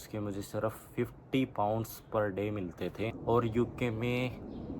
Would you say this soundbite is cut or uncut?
cut